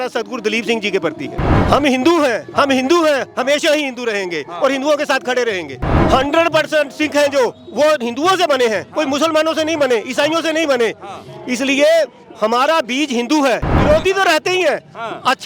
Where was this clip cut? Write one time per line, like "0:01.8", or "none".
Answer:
0:01.5
0:06.0
0:13.7